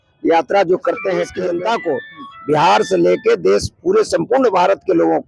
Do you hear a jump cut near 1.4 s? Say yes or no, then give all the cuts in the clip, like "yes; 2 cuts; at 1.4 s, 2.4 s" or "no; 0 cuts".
yes; 1 cut; at 1.4 s